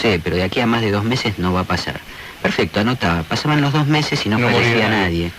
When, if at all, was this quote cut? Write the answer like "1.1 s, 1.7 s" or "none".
2.5 s